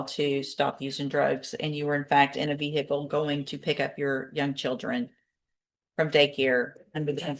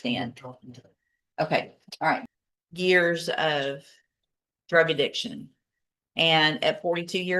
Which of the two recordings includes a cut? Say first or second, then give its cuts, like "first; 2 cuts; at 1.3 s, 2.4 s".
second; 1 cut; at 2.3 s